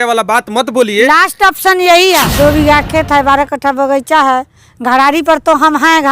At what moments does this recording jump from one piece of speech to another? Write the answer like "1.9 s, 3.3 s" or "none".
2.3 s